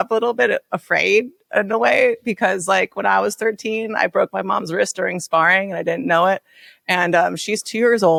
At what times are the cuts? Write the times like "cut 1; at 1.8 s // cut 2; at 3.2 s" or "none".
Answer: none